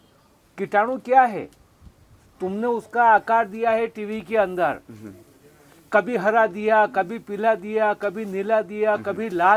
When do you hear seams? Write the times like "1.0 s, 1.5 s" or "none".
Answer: none